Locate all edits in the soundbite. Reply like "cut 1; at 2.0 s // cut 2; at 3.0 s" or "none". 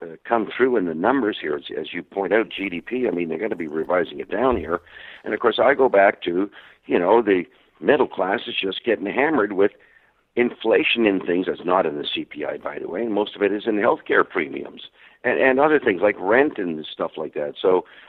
none